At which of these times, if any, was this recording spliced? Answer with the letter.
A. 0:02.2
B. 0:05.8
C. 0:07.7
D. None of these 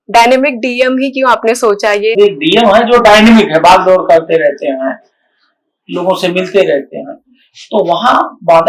A